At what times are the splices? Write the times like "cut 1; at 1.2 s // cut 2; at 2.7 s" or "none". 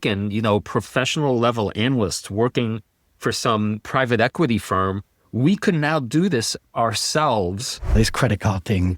cut 1; at 3.8 s // cut 2; at 8.0 s